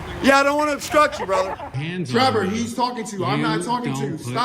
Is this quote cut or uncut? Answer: cut